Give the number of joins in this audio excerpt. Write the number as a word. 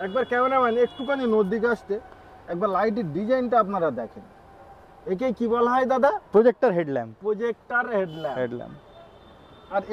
zero